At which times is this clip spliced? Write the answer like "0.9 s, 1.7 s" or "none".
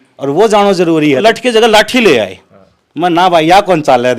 1.2 s